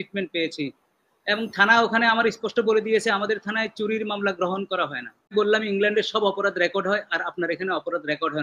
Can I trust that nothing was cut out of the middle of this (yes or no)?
no